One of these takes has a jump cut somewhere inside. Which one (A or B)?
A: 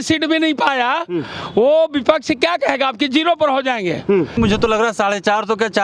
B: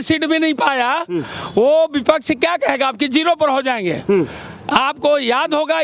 A